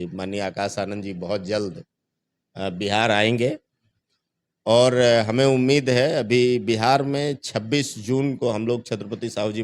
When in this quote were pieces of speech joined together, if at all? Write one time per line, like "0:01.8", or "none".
none